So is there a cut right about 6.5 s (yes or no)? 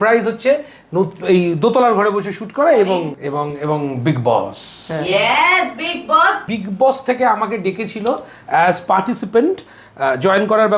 yes